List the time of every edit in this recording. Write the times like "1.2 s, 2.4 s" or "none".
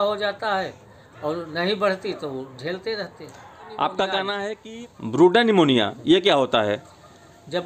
4.6 s